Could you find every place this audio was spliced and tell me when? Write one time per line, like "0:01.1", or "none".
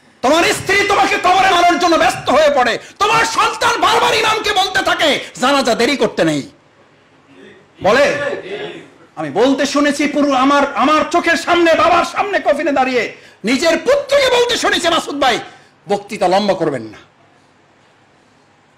0:01.5